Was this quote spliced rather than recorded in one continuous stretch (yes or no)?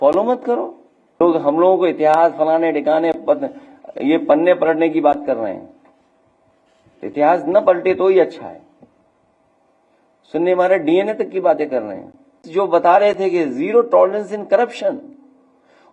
yes